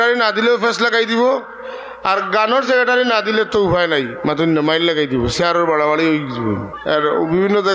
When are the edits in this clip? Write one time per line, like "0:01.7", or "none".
0:06.7

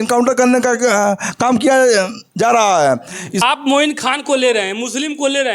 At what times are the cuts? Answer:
0:03.4

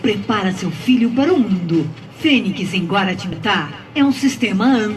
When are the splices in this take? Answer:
0:03.3

